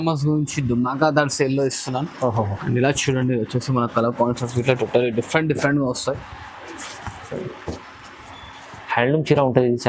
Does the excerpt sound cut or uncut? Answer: uncut